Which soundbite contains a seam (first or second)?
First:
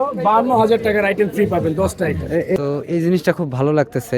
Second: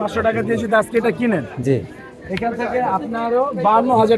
first